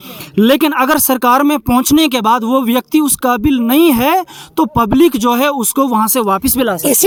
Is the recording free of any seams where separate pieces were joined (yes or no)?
yes